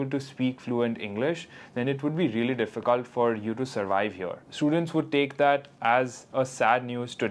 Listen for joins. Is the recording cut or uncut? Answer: cut